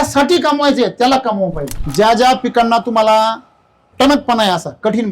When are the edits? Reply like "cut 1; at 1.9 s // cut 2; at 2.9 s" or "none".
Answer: cut 1; at 1.7 s